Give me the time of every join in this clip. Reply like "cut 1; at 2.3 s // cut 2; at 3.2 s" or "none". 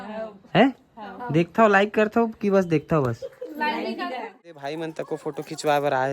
cut 1; at 4.3 s